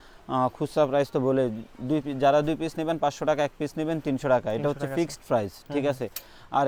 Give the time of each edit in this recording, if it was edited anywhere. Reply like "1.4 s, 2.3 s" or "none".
none